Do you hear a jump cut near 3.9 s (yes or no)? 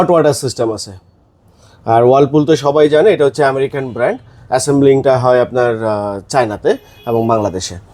no